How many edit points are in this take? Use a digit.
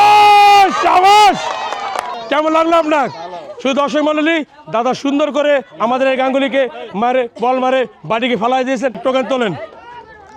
2